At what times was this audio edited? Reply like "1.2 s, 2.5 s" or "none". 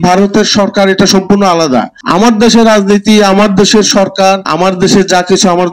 2.0 s, 4.5 s